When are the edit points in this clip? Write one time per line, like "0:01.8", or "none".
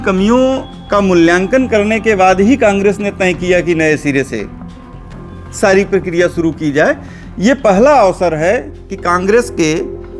none